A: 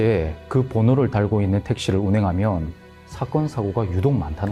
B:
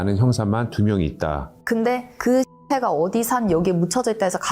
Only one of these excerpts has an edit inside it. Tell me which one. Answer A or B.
B